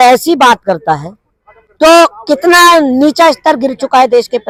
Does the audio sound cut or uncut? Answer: uncut